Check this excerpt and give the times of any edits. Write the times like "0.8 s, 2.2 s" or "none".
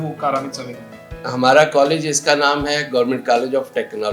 1.1 s